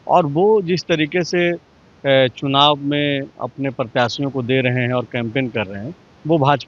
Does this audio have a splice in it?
no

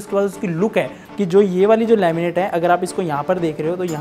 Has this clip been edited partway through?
yes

